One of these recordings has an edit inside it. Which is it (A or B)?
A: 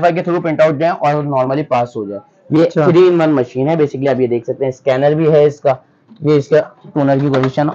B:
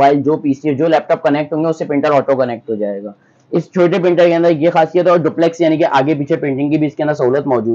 A